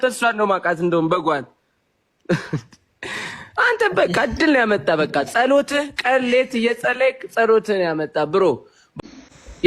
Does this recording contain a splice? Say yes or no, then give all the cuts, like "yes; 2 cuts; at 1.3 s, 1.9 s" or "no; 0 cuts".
yes; 1 cut; at 8.8 s